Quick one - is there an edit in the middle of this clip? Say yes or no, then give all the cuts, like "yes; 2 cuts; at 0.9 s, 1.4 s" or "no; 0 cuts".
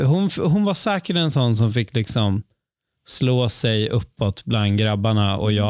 no; 0 cuts